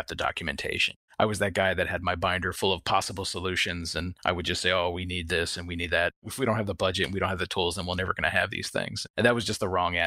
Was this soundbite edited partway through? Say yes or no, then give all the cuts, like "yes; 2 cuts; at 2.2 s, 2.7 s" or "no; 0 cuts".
yes; 1 cut; at 9.0 s